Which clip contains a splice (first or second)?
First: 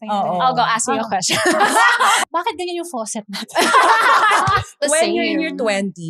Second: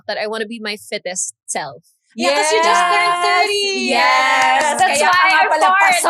first